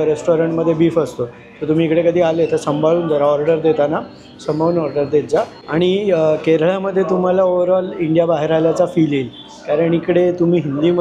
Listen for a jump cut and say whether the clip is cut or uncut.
uncut